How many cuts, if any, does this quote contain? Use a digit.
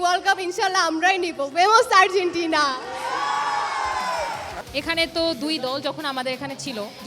0